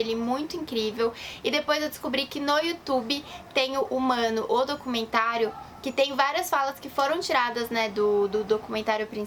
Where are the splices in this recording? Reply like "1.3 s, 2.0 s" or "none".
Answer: none